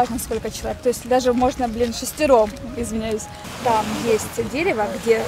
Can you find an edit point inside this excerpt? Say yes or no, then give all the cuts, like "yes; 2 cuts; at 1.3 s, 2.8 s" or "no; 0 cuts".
yes; 1 cut; at 3.4 s